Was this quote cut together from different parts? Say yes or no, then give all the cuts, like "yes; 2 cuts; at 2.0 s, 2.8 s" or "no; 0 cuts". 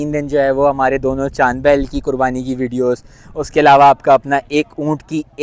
no; 0 cuts